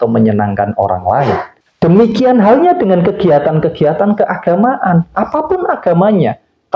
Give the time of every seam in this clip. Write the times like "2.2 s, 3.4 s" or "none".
1.6 s